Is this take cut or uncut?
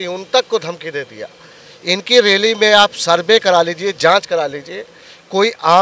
uncut